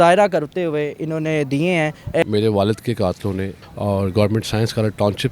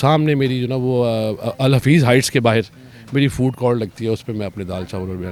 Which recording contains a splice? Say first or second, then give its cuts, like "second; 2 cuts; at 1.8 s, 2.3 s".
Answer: first; 2 cuts; at 2.2 s, 3.6 s